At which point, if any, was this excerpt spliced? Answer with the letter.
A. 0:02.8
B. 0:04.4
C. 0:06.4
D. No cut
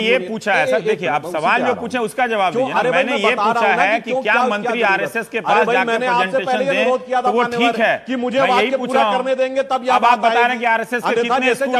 D